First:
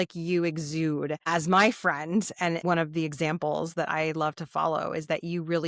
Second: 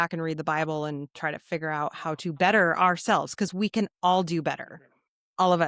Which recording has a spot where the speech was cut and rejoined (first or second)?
first